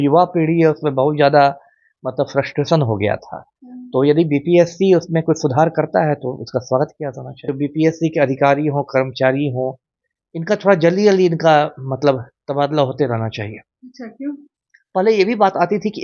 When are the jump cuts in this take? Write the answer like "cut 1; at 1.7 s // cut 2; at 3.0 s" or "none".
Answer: cut 1; at 7.3 s